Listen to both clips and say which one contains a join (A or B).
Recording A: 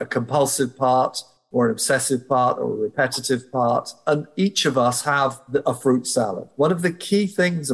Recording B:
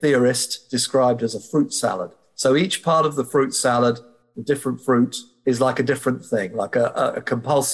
A